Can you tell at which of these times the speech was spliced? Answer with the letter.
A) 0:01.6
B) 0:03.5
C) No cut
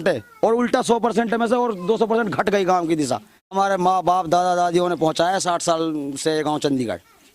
B